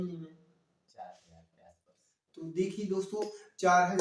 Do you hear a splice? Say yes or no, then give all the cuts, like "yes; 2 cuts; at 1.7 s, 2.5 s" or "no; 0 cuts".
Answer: no; 0 cuts